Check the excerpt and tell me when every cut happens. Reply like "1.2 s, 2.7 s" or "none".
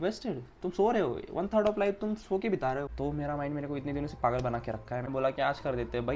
2.9 s, 5.1 s